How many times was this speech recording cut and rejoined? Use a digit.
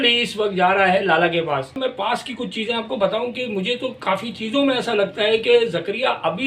1